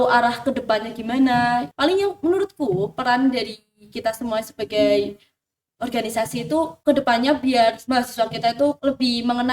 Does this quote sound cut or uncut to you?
cut